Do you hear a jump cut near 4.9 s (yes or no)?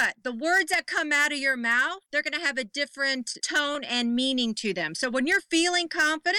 no